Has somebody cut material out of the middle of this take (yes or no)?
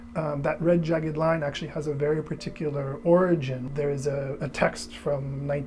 yes